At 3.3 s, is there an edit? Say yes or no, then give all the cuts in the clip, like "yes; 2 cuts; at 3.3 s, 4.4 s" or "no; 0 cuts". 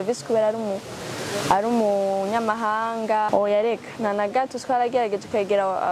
yes; 1 cut; at 3.3 s